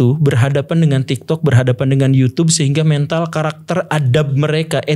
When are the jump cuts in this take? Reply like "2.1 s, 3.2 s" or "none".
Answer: none